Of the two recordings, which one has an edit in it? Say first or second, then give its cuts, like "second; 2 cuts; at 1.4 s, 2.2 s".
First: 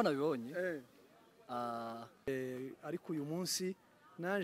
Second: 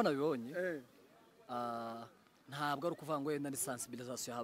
first; 1 cut; at 2.3 s